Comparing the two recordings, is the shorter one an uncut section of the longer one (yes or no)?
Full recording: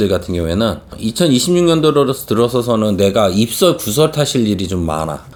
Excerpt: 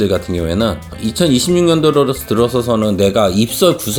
yes